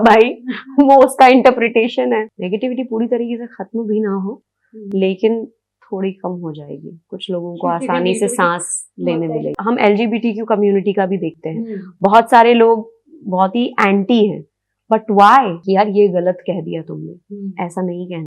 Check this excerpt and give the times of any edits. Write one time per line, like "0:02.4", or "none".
0:02.3
0:09.6
0:15.6